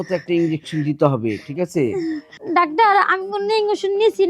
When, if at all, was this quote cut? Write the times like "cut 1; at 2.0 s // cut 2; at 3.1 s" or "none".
cut 1; at 2.4 s